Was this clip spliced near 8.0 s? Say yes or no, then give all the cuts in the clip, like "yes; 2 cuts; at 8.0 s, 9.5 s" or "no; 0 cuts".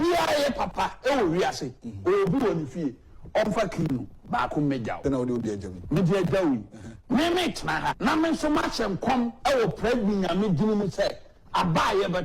yes; 2 cuts; at 5.0 s, 8.0 s